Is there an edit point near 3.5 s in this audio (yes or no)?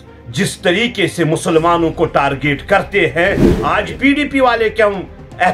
yes